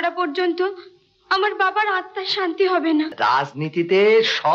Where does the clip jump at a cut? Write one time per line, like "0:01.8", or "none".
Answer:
0:03.1